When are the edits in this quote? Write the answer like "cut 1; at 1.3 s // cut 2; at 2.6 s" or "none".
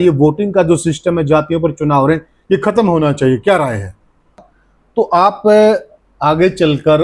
cut 1; at 4.5 s